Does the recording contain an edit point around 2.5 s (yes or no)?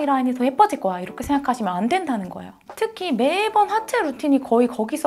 yes